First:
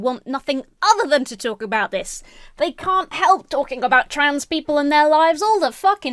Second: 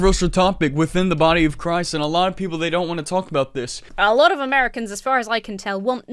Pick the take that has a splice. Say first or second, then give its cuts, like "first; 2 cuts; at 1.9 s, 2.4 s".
second; 1 cut; at 3.8 s